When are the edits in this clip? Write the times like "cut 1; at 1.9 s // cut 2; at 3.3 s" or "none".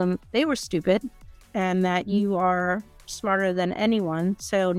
cut 1; at 1.5 s